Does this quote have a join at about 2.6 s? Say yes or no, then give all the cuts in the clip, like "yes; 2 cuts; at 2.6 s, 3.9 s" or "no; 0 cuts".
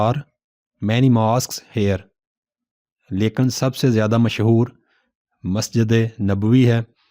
yes; 1 cut; at 2.6 s